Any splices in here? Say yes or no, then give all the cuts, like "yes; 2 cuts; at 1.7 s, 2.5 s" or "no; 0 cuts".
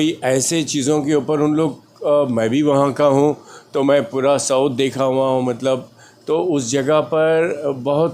no; 0 cuts